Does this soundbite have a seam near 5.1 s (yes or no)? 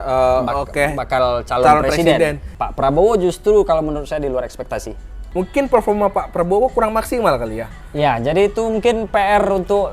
yes